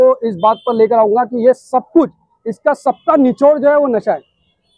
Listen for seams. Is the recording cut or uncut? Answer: uncut